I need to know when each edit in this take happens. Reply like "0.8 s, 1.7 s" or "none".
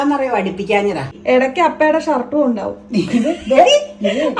1.1 s